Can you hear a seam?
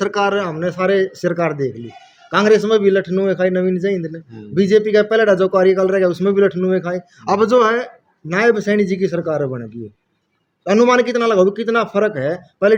no; 0 cuts

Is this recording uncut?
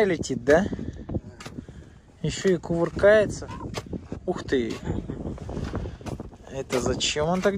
no; 2 cuts; at 3.4 s, 6.3 s

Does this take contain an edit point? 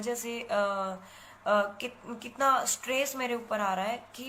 no; 0 cuts

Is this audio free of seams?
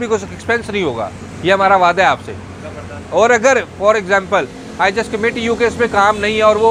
yes; 0 cuts

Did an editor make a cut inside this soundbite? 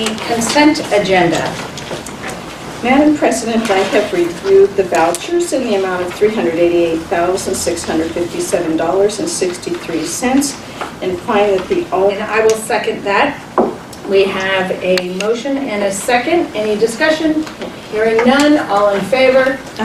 no; 0 cuts

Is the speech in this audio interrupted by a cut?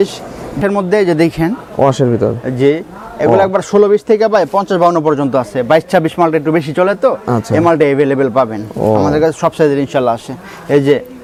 no; 0 cuts

